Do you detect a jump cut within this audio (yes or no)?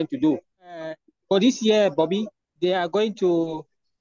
yes